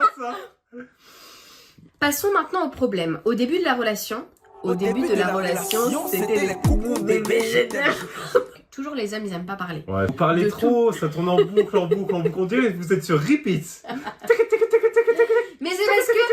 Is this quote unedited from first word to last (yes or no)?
no